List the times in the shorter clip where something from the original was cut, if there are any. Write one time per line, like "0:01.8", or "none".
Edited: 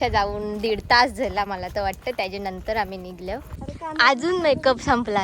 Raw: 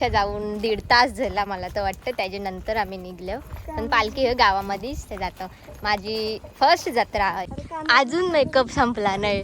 0:03.6

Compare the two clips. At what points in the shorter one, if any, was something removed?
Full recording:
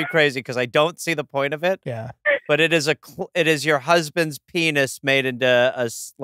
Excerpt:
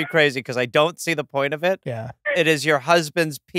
0:02.2

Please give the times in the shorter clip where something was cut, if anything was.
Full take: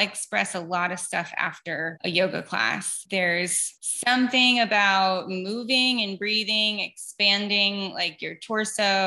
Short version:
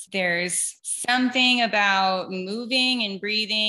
none

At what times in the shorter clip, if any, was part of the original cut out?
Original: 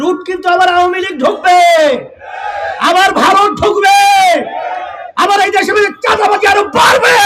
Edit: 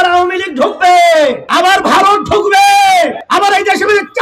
0:01.4
0:03.2

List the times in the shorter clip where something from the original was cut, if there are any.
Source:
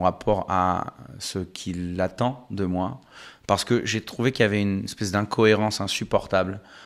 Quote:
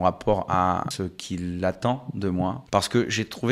0:00.9
0:02.6

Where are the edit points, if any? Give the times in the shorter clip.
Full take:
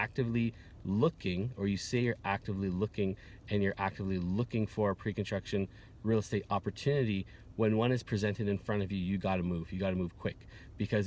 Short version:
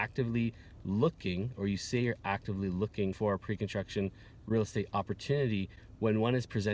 0:03.2

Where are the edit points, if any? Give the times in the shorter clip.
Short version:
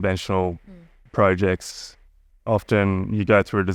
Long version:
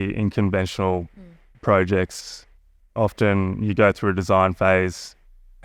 none

